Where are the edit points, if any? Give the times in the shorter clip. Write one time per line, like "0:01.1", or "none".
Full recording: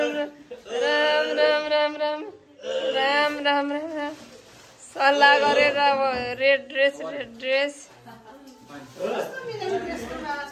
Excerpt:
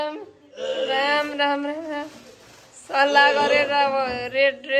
none